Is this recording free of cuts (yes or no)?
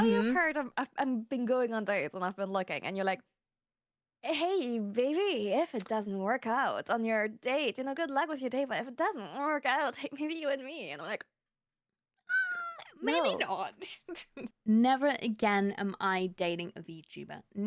no